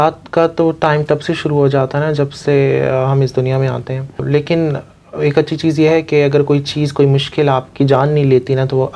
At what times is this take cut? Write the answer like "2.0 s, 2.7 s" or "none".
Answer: 4.2 s